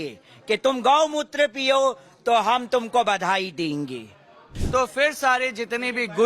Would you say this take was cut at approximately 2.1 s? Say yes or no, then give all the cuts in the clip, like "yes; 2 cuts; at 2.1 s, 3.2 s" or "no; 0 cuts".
no; 1 cut; at 4.5 s